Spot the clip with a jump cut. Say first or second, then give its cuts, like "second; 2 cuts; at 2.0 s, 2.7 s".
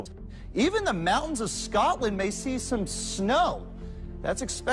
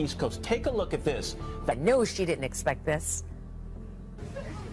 first; 1 cut; at 3.0 s